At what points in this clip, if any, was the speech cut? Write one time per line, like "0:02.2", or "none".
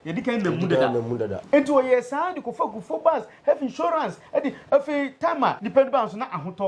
0:01.4
0:05.6